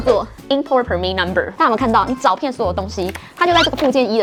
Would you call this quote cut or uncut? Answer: uncut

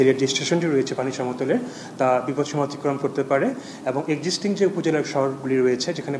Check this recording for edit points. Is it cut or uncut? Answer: uncut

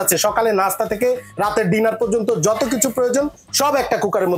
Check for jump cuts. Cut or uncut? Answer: uncut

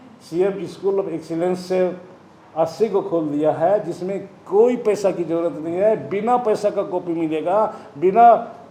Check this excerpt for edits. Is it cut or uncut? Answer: uncut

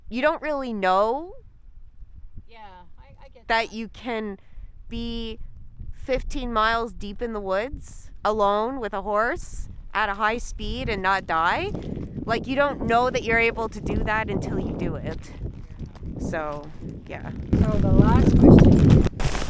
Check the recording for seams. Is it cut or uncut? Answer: uncut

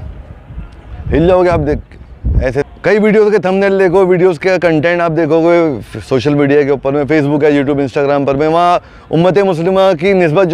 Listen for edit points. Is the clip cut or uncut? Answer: cut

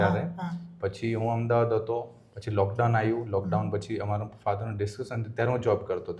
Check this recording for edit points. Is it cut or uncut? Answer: uncut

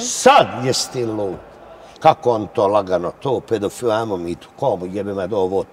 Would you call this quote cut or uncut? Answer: cut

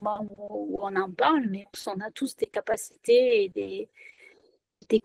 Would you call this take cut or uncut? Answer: cut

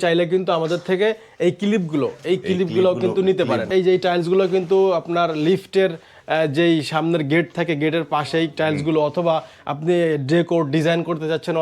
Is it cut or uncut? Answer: cut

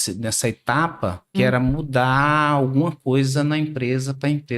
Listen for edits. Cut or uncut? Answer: cut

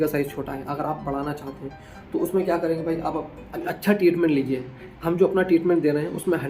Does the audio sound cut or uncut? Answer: cut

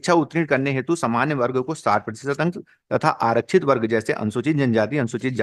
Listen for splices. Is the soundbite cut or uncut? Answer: uncut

